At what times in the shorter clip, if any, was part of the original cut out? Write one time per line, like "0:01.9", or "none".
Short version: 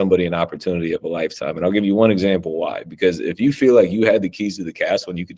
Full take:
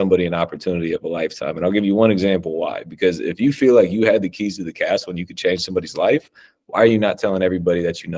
none